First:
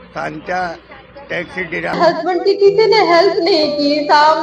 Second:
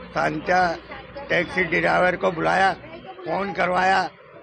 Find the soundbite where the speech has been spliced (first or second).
first